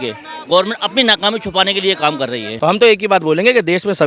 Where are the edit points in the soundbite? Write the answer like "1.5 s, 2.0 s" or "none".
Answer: 2.4 s